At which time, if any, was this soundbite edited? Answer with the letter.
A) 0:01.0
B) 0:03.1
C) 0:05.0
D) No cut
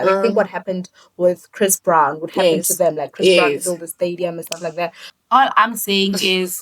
C